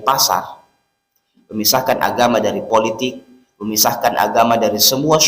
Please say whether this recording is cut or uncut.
uncut